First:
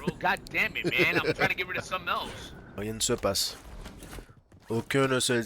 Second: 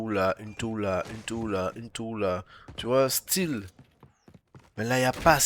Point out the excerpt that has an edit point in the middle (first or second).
first